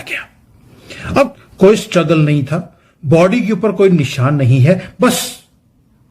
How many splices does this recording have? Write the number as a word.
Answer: one